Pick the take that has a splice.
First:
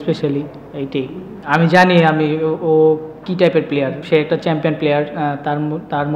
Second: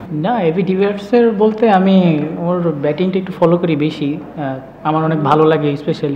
first; 2 cuts; at 1.3 s, 4.0 s

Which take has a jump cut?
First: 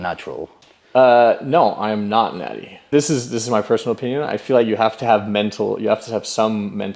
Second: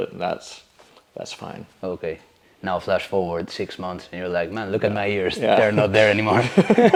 first; 2 cuts; at 2.9 s, 5.0 s

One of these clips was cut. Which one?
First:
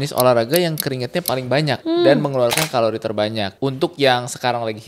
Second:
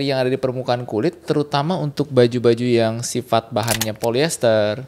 first; 2 cuts; at 1.8 s, 3.5 s

